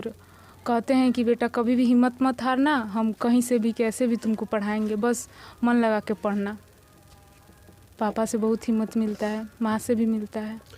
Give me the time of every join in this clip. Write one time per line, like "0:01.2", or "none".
none